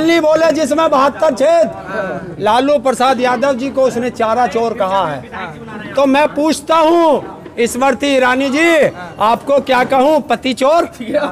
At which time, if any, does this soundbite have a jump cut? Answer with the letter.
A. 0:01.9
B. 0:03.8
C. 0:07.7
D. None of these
D